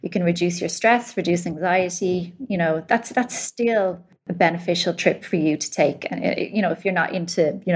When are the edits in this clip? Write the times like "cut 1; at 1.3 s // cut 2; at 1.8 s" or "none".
cut 1; at 4.2 s